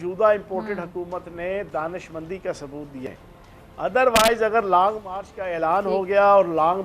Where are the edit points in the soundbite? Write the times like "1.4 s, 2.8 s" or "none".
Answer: 3.1 s